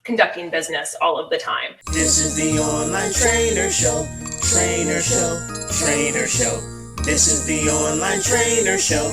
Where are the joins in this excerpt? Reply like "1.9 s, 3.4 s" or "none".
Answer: 1.8 s